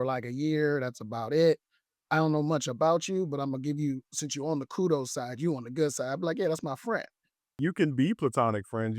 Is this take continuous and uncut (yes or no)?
no